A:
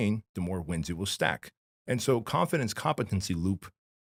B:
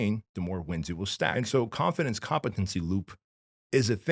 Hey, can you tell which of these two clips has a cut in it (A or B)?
B